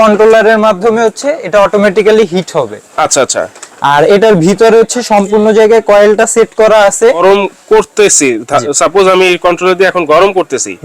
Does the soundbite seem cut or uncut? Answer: cut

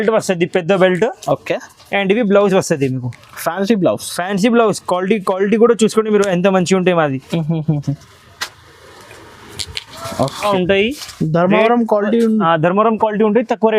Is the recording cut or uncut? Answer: cut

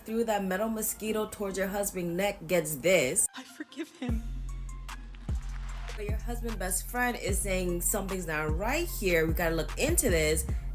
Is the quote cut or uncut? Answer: uncut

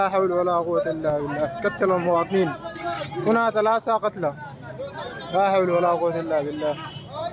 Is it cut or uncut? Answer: uncut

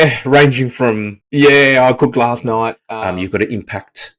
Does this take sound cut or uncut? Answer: cut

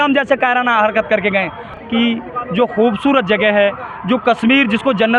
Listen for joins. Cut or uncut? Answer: cut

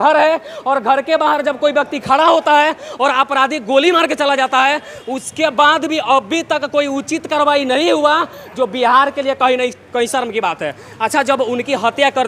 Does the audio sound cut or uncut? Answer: uncut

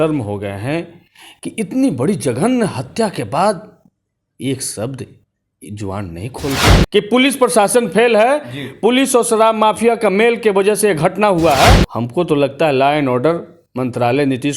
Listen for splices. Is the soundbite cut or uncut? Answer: cut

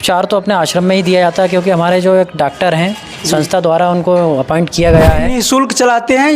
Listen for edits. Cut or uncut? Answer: cut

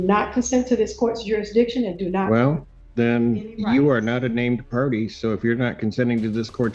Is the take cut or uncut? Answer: uncut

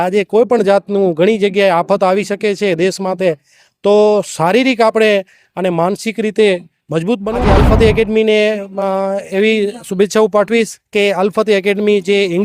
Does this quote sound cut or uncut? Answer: cut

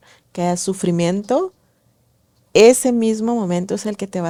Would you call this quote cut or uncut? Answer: uncut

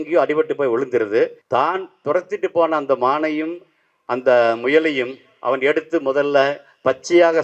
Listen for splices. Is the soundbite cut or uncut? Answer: cut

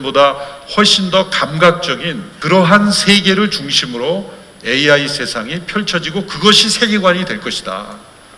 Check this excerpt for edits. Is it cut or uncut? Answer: uncut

